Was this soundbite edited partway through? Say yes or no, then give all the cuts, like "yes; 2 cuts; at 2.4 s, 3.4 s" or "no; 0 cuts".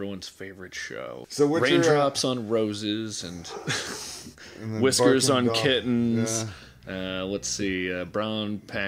yes; 1 cut; at 1.2 s